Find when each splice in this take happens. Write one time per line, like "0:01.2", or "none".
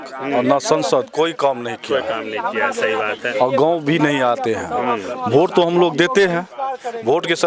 none